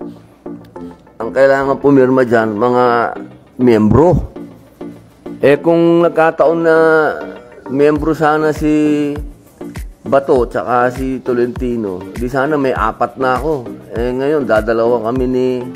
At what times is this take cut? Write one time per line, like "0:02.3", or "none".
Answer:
0:01.0